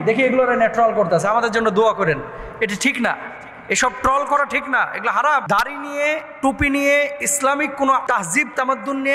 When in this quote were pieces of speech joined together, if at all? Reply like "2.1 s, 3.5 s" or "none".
5.4 s, 8.0 s